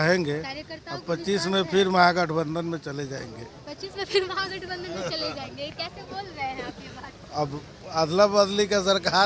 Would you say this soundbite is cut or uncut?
uncut